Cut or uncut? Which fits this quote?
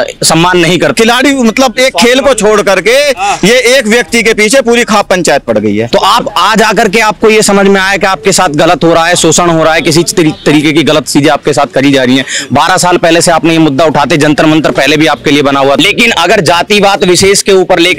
cut